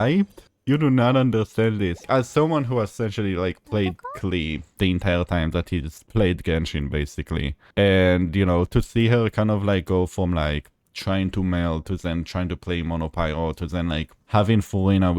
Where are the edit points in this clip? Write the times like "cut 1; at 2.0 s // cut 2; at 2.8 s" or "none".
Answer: cut 1; at 2.0 s

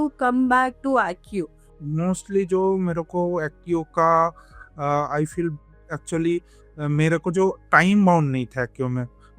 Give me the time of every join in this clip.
cut 1; at 1.7 s

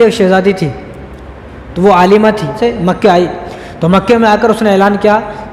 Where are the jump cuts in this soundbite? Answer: cut 1; at 2.6 s

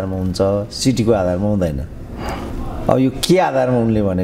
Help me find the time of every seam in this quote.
none

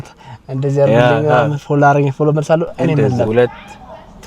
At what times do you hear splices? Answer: cut 1; at 3.3 s

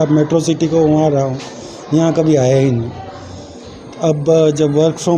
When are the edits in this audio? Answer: none

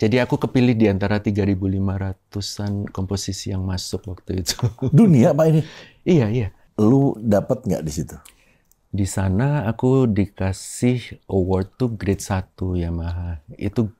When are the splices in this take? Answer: cut 1; at 6.6 s

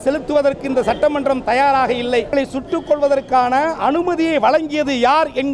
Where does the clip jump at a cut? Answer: cut 1; at 2.3 s

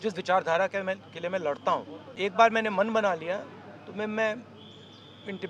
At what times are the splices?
cut 1; at 2.3 s

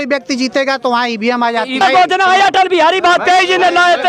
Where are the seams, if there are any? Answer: cut 1; at 1.8 s

